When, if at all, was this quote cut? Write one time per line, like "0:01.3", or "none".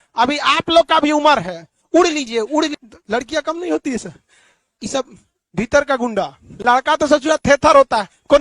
0:02.8
0:06.4